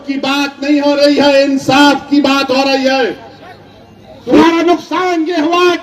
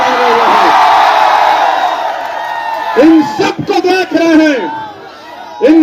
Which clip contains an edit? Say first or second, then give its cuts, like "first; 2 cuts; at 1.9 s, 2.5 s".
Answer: first; 1 cut; at 4.4 s